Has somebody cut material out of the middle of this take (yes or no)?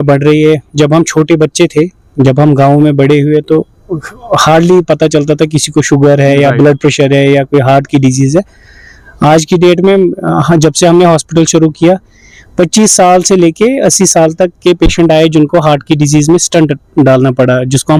no